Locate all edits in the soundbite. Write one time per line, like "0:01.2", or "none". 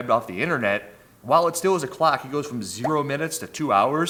none